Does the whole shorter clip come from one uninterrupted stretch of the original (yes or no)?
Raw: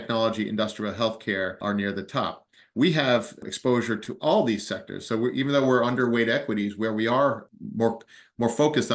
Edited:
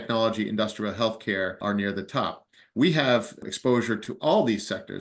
yes